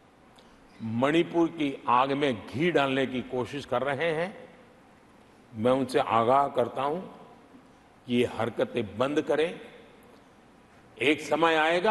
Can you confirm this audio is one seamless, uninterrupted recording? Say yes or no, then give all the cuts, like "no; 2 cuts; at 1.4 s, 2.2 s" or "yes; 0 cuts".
yes; 0 cuts